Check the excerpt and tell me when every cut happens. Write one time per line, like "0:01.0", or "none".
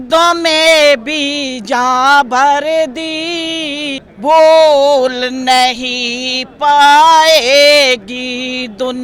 0:04.1